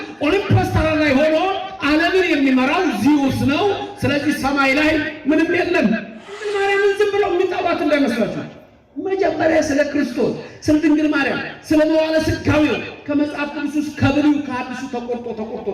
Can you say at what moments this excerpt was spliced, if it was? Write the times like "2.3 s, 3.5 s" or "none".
6.5 s